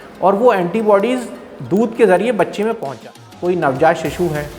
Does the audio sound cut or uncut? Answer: cut